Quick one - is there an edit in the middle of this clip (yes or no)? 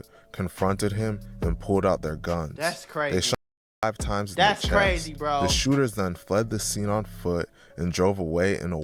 no